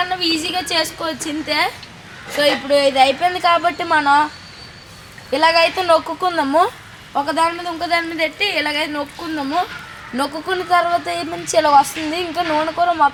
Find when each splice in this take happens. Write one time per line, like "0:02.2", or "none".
none

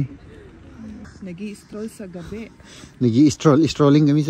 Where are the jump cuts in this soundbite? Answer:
0:01.1

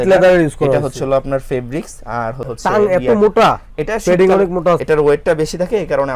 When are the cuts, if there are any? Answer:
0:04.8

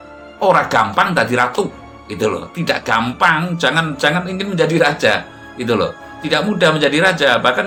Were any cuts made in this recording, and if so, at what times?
none

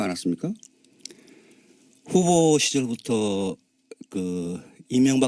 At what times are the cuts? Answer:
0:03.8

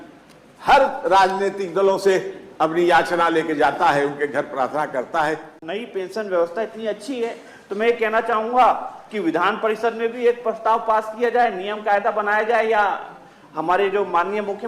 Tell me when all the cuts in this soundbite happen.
0:05.6

